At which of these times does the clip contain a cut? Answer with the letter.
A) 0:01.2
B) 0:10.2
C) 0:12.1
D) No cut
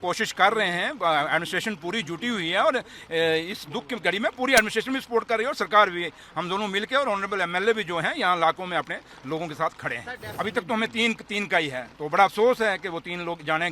B